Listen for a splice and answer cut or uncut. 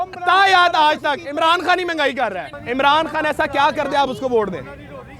cut